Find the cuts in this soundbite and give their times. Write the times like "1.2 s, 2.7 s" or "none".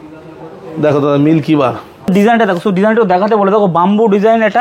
2.1 s

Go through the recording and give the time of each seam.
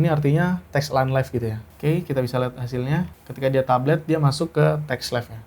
1.7 s, 3.2 s

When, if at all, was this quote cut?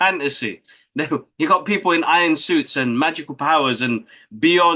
none

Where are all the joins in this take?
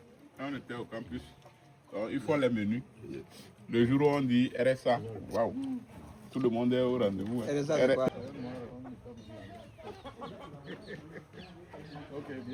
none

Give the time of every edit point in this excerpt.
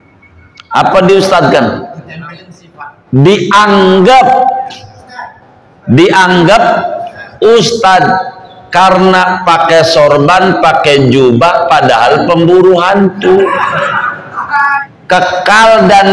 14.9 s

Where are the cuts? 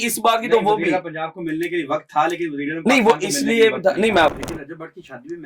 4.4 s

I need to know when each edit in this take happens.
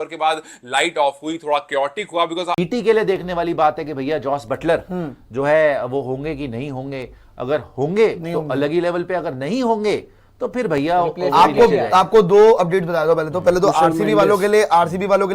2.6 s

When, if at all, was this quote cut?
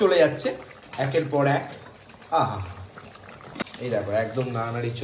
none

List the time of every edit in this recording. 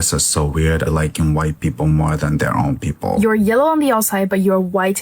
3.2 s

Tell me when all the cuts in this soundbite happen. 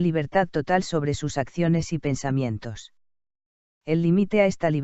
none

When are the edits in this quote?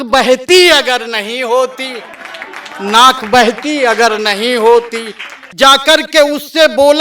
5.5 s

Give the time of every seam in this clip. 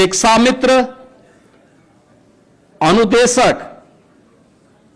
none

